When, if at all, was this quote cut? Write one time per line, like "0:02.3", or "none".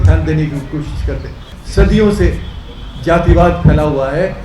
0:01.5